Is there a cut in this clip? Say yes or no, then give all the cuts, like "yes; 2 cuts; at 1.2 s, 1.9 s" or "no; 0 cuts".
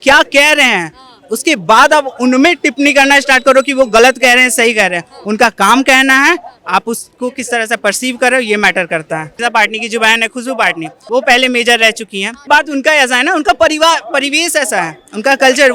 yes; 3 cuts; at 9.3 s, 10.9 s, 12.3 s